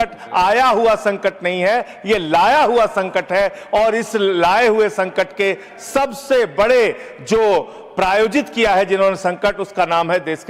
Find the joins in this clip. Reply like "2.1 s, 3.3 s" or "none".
none